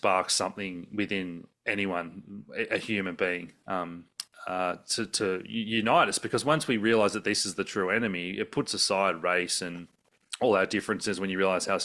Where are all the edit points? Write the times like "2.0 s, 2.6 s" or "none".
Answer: none